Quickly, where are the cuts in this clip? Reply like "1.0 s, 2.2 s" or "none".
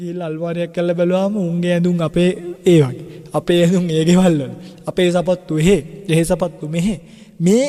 none